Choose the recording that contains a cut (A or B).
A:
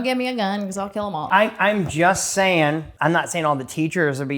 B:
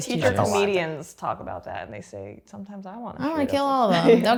A